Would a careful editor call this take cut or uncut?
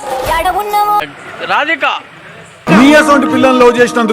cut